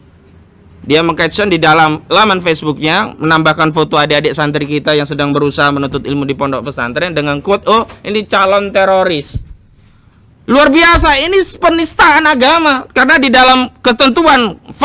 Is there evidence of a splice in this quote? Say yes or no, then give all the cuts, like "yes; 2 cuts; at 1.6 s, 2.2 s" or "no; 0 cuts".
no; 0 cuts